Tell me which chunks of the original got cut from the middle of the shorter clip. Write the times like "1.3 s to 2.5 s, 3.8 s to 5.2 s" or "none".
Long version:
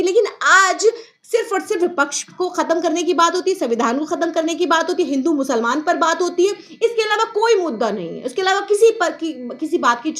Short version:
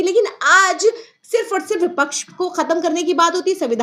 none